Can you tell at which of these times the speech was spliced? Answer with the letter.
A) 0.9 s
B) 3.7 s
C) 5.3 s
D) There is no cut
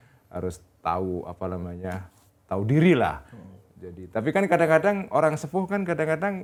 D